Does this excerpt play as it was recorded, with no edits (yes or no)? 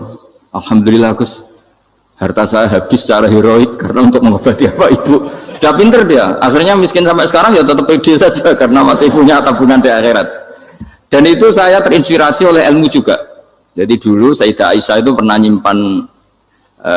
yes